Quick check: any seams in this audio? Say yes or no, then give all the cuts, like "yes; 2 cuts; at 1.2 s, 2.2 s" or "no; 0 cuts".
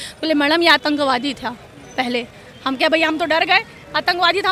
no; 0 cuts